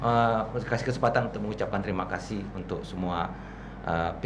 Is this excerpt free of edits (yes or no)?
yes